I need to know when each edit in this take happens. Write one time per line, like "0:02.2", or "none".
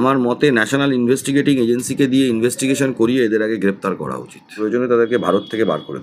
0:04.6